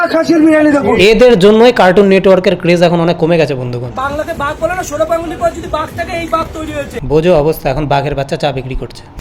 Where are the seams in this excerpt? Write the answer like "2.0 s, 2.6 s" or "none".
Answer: 1.0 s, 3.9 s